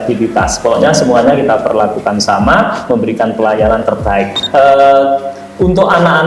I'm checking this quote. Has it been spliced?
yes; 1 cut; at 4.4 s

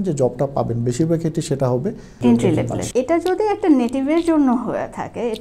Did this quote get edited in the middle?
yes; 1 cut; at 2.8 s

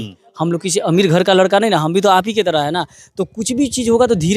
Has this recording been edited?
no; 0 cuts

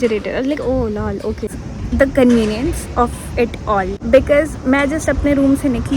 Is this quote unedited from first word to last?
no; 2 cuts; at 1.6 s, 4.0 s

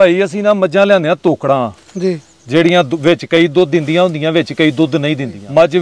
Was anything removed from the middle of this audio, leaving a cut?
no; 0 cuts

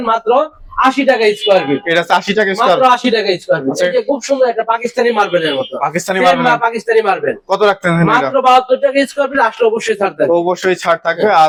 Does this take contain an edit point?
no; 0 cuts

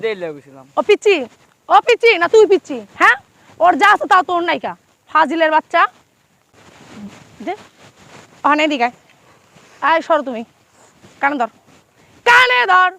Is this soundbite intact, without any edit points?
no; 1 cut; at 6.5 s

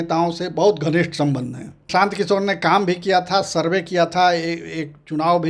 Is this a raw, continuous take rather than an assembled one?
no; 1 cut; at 1.8 s

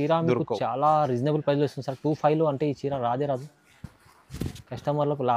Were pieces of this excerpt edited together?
no; 0 cuts

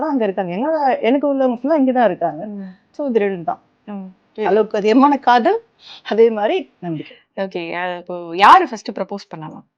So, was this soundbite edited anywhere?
no; 0 cuts

